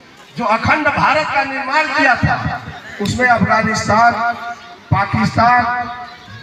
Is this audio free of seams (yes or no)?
yes